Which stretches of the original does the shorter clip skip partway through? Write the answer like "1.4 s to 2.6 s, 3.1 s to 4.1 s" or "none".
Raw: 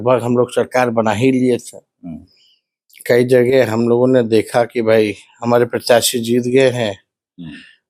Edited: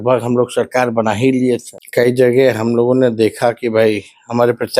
1.8 s to 2.9 s